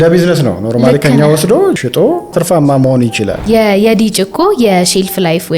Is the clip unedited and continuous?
no; 1 cut; at 3.4 s

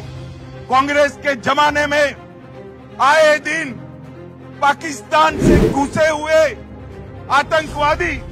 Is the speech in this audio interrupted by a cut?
no; 0 cuts

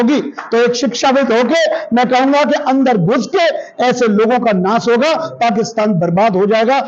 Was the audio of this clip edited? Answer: no; 0 cuts

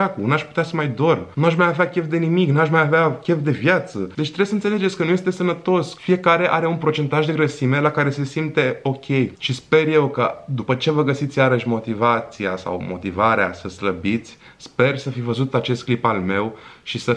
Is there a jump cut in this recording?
yes; 2 cuts; at 4.1 s, 9.3 s

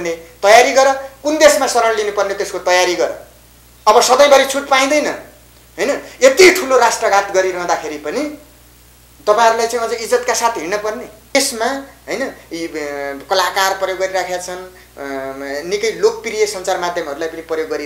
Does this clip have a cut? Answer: no; 0 cuts

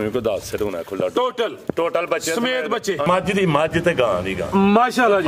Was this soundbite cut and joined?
yes; 1 cut; at 3.1 s

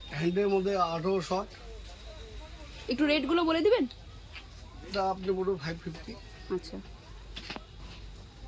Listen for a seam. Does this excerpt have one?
no; 0 cuts

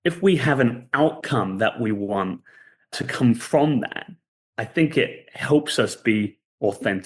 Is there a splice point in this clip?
yes; 1 cut; at 2.9 s

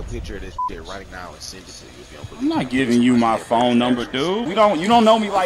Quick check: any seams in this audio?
yes; 1 cut; at 4.5 s

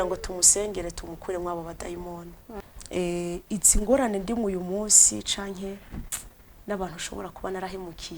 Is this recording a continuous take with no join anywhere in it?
no; 1 cut; at 2.6 s

